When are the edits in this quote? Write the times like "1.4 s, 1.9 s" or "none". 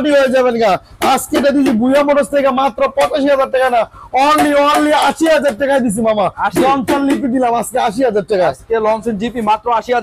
none